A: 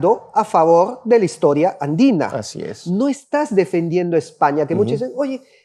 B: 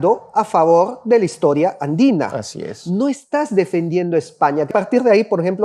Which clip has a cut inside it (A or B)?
B